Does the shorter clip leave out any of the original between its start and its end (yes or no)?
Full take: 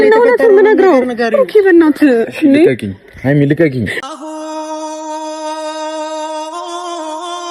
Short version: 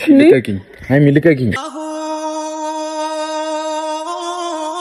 yes